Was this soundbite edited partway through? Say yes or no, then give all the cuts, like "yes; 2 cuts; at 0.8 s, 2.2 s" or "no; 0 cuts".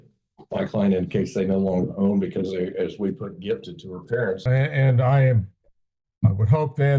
yes; 1 cut; at 4.4 s